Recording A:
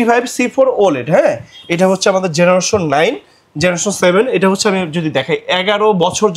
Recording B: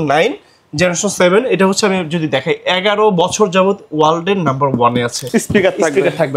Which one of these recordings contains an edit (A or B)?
B